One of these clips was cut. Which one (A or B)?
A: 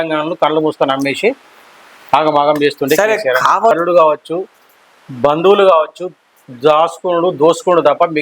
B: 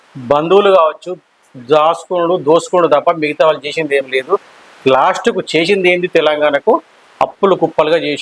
A